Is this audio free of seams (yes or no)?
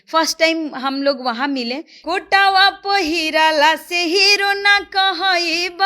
no